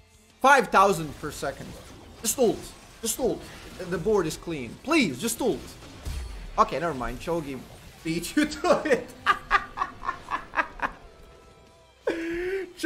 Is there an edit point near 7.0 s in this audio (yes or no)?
no